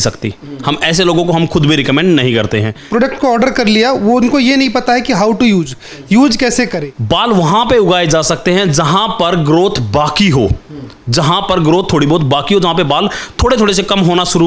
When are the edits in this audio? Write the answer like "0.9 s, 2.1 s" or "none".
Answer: 2.8 s, 6.8 s